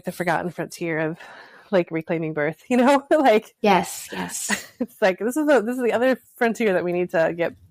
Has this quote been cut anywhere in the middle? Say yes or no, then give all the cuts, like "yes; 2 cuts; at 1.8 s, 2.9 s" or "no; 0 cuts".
no; 0 cuts